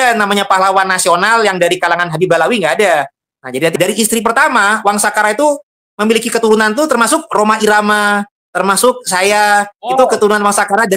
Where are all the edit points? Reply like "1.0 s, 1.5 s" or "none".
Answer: 3.7 s